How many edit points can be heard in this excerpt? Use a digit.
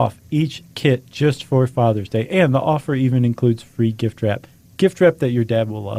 0